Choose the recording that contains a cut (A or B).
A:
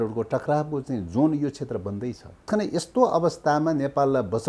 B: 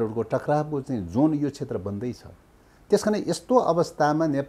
A